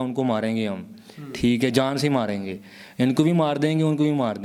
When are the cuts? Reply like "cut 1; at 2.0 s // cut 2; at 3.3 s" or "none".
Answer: none